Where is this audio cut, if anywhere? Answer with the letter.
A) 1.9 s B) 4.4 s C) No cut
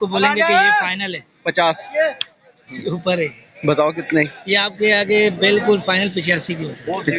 C